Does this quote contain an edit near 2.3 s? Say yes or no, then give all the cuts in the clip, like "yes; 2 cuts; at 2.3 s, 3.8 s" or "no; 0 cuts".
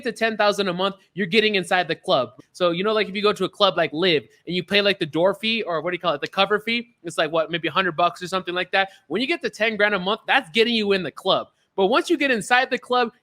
yes; 1 cut; at 2.3 s